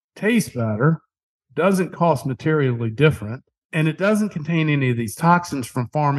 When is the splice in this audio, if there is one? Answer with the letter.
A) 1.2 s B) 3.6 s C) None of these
B